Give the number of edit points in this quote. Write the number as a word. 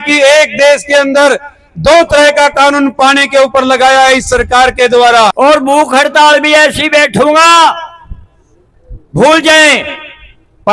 one